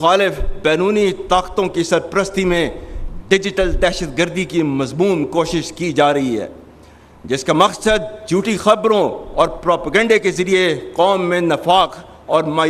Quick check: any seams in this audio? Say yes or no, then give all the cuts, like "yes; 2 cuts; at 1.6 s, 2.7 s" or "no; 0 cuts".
no; 0 cuts